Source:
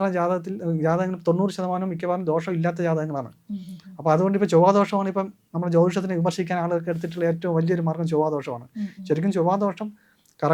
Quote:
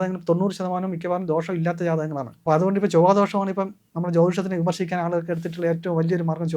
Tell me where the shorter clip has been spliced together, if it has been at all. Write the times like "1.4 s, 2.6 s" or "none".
2.3 s